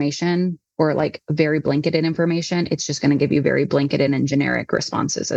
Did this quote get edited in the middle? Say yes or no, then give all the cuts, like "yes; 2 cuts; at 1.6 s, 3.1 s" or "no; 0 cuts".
no; 0 cuts